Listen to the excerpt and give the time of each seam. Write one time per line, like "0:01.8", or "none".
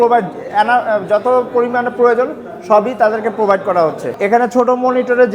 0:04.1